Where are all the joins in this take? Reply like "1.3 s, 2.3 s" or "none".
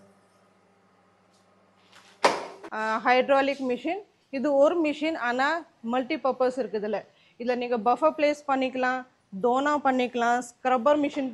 2.6 s